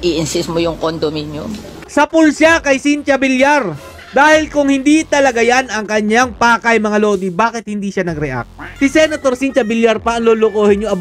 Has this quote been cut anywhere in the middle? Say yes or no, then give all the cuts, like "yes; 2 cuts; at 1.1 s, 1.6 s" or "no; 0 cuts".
yes; 1 cut; at 8.6 s